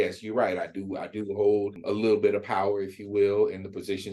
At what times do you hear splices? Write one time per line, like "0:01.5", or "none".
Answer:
0:01.8